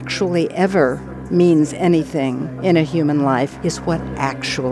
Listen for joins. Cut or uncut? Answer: cut